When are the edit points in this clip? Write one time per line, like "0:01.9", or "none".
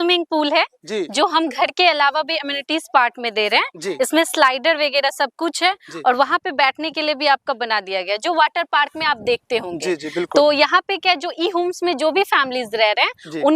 none